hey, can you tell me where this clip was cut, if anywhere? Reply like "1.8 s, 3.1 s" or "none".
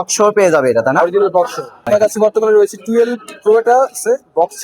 1.9 s